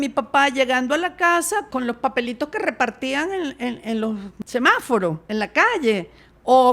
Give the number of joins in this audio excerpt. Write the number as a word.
three